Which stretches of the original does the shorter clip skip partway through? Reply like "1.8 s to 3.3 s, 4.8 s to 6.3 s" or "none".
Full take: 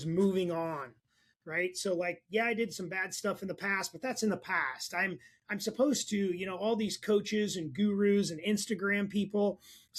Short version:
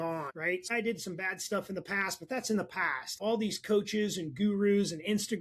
1.3 s to 2.4 s, 4.8 s to 6.5 s